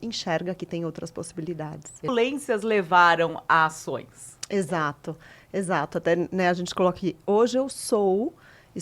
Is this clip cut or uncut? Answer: cut